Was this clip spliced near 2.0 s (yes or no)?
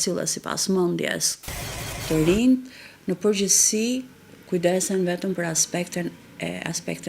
yes